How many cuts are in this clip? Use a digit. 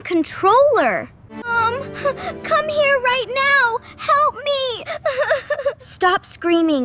0